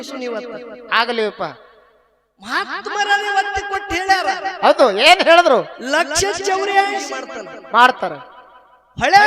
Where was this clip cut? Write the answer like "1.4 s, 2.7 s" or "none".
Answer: 7.0 s

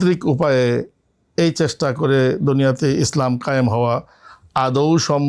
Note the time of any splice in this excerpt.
none

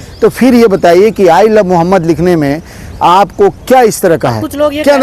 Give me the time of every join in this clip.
none

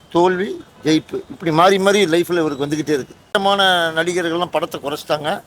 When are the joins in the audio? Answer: 3.4 s

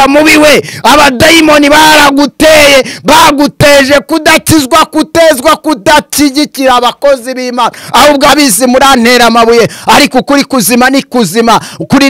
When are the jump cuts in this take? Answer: 8.3 s

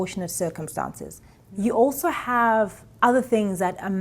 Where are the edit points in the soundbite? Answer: 1.3 s

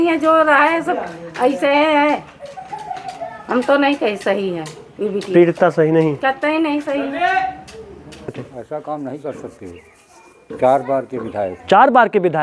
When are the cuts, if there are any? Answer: 8.5 s

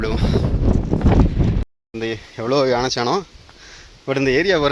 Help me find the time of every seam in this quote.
1.8 s

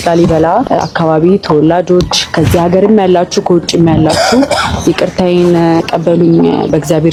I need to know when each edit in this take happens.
none

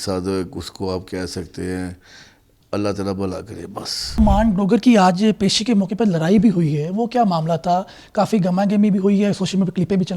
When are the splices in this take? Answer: 4.2 s

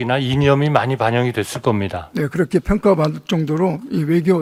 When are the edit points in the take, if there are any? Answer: none

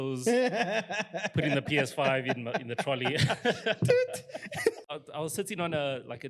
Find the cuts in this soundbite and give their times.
4.8 s

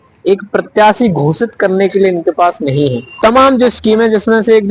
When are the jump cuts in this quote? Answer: 3.1 s

